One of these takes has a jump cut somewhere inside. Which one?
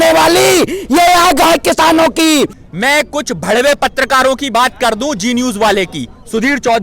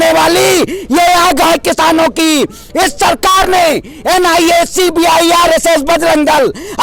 first; 1 cut; at 2.6 s

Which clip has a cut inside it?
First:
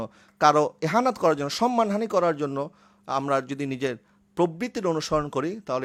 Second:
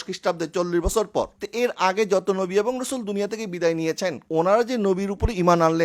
second; 2 cuts; at 1.4 s, 4.2 s

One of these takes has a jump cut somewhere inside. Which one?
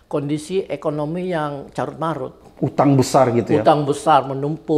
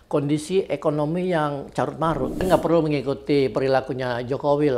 second; 1 cut; at 2.5 s

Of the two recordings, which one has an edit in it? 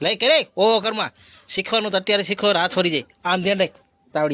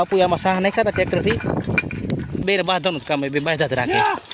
second; 1 cut; at 2.4 s

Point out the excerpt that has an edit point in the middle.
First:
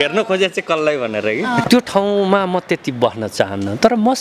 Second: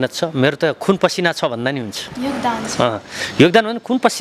first; 1 cut; at 1.6 s

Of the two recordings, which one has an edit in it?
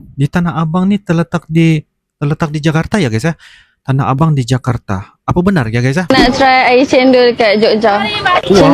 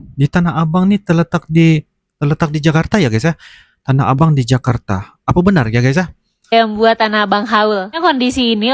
first; 1 cut; at 6.0 s

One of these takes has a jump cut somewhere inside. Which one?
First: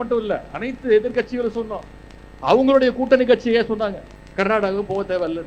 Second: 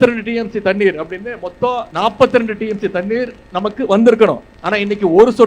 second; 2 cuts; at 1.9 s, 4.5 s

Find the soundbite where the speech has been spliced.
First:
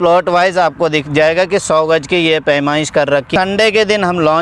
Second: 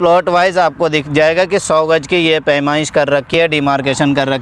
first; 1 cut; at 3.3 s

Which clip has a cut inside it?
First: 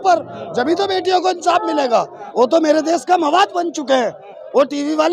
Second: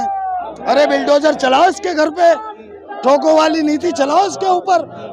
first; 1 cut; at 2.2 s

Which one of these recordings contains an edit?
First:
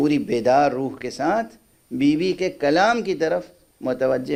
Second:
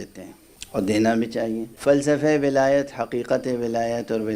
second; 1 cut; at 1.7 s

